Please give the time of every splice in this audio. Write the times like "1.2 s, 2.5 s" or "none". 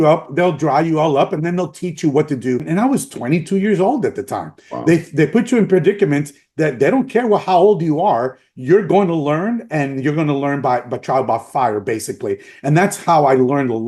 2.7 s